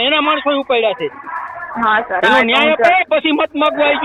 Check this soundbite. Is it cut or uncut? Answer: uncut